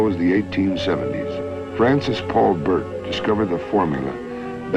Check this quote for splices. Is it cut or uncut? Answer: cut